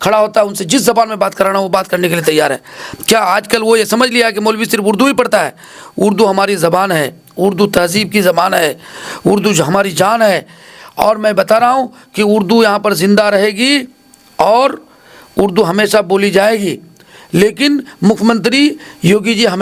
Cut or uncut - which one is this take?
uncut